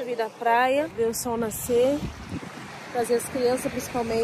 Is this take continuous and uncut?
no; 1 cut; at 0.9 s

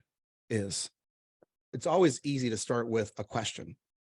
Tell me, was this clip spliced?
yes; 1 cut; at 1.7 s

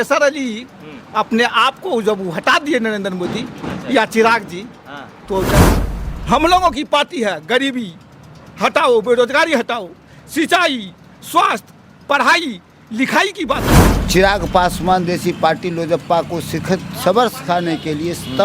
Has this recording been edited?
yes; 2 cuts; at 5.7 s, 13.9 s

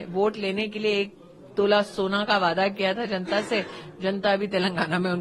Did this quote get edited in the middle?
no; 0 cuts

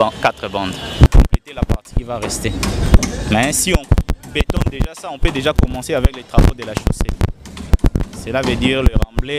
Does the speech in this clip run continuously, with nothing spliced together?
no; 1 cut; at 1.1 s

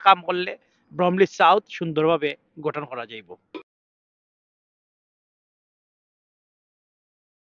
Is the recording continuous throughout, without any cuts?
yes; 0 cuts

